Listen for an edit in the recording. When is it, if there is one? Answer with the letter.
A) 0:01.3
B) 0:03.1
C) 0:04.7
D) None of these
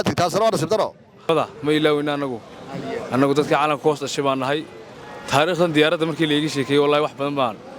A